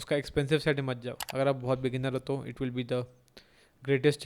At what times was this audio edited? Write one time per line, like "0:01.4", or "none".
0:01.2